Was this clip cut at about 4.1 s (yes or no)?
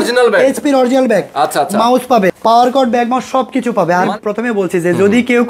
yes